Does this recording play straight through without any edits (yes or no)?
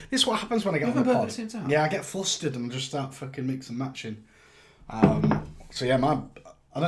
yes